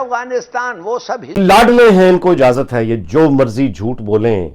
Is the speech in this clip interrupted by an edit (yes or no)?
yes